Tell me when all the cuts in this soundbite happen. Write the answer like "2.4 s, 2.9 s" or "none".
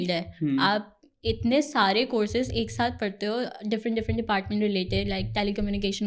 none